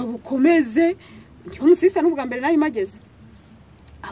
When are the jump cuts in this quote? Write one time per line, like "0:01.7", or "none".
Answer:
none